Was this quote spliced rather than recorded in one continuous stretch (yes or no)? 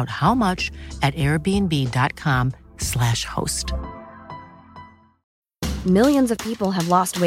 yes